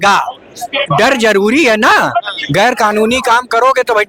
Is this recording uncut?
yes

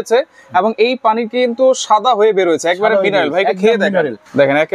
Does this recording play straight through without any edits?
yes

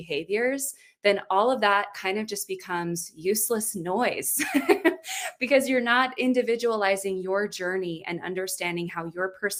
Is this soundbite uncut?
yes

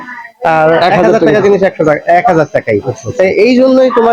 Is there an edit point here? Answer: no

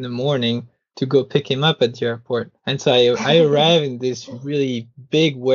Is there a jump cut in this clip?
yes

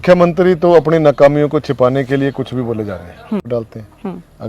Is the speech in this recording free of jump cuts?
no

